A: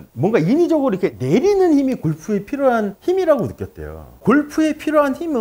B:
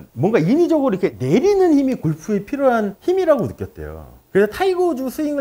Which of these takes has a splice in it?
A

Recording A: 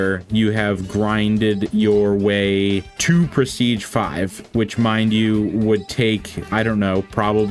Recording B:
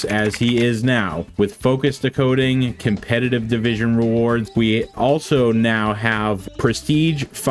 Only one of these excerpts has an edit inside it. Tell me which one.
B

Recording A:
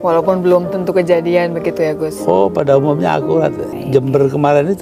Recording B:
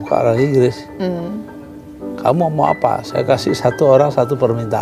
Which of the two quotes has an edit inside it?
A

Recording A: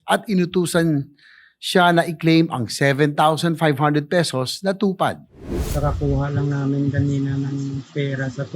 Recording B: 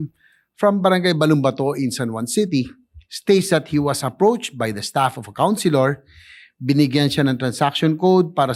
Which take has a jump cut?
A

